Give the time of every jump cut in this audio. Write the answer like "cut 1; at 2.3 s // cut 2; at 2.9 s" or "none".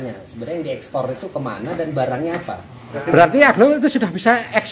cut 1; at 3.1 s